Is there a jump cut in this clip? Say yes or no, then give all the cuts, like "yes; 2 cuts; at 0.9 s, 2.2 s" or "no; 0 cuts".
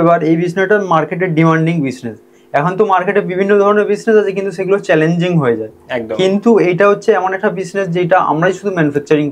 no; 0 cuts